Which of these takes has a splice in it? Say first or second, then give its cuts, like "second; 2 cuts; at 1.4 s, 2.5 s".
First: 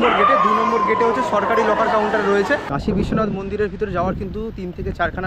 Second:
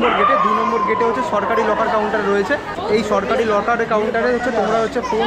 first; 1 cut; at 2.7 s